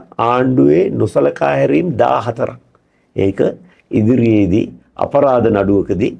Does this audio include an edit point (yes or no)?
no